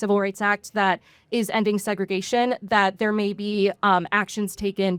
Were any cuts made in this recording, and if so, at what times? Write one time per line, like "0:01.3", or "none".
none